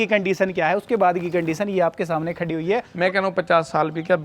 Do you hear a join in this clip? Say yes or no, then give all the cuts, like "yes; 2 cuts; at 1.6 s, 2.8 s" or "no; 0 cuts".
yes; 1 cut; at 2.9 s